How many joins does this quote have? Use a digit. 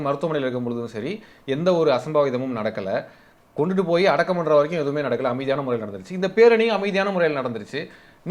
0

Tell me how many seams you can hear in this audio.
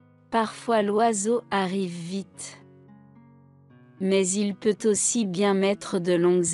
0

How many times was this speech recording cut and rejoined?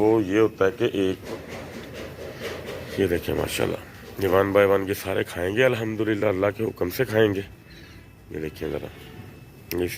1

